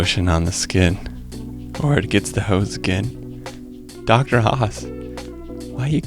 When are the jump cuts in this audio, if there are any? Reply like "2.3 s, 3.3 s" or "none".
none